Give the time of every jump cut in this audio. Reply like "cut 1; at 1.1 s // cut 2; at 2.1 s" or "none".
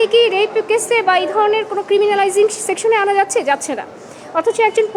none